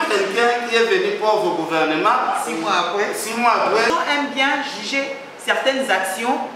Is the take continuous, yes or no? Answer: no